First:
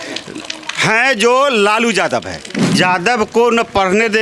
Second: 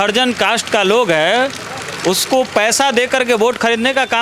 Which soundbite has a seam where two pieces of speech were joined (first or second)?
first